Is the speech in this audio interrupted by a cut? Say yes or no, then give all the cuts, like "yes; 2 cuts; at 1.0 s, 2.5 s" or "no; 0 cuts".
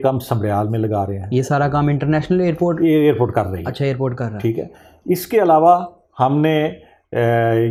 no; 0 cuts